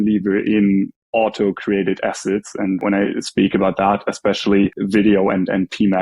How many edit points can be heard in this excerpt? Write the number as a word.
two